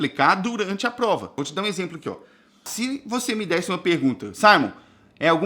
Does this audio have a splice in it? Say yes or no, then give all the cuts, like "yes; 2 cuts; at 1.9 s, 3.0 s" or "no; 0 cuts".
yes; 2 cuts; at 1.4 s, 2.7 s